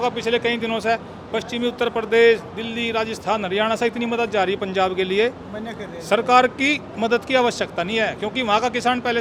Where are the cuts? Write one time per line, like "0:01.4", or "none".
none